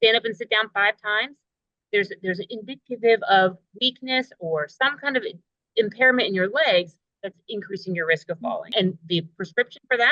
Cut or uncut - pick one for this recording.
cut